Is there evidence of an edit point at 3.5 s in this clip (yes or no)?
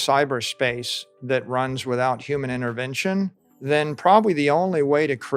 yes